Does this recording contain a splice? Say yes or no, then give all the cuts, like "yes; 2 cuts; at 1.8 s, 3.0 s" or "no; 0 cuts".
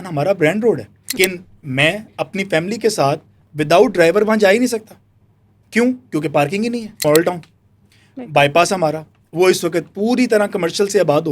yes; 2 cuts; at 1.1 s, 7.0 s